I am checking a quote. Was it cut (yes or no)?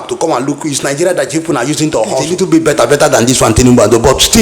yes